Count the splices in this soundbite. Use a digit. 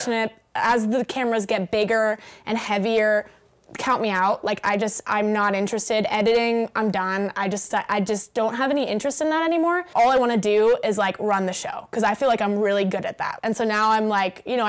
2